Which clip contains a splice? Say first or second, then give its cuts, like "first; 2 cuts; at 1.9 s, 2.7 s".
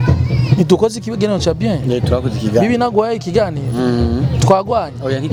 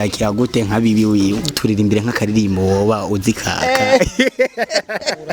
second; 1 cut; at 1.5 s